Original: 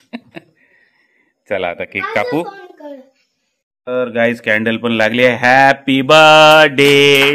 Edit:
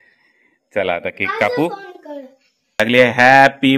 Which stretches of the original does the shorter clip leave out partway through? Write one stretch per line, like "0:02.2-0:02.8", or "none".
0:03.5-0:05.0